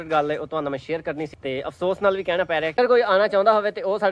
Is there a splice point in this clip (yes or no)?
yes